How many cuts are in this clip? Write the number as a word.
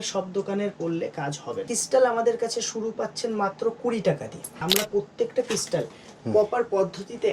two